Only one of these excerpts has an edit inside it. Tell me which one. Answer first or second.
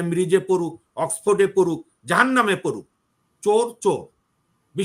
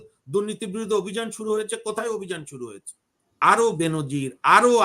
second